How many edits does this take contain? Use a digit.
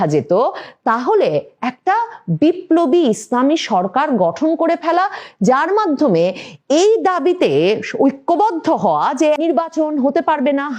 1